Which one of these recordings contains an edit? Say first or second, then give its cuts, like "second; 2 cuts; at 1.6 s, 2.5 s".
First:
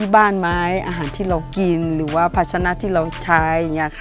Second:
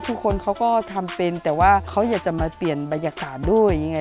second; 1 cut; at 1.9 s